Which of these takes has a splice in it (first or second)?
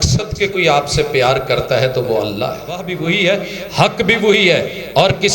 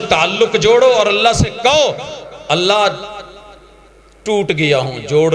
first